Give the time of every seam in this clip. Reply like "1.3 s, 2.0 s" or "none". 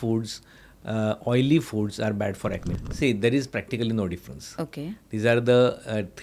2.6 s